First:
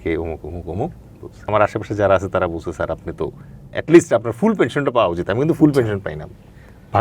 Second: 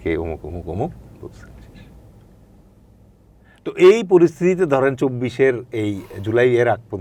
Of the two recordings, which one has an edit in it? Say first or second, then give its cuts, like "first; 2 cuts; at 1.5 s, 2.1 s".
first; 1 cut; at 1.5 s